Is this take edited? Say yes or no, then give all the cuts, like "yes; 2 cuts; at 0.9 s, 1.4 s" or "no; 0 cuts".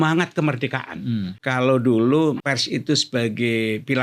yes; 2 cuts; at 1.4 s, 2.4 s